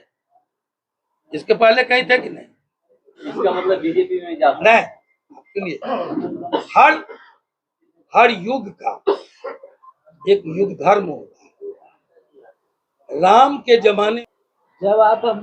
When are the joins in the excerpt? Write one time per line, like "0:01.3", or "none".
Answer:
0:03.2
0:14.2